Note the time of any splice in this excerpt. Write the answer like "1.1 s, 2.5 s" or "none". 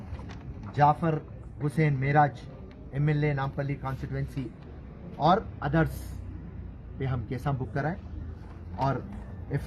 none